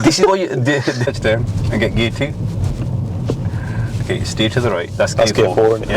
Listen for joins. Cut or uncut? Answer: cut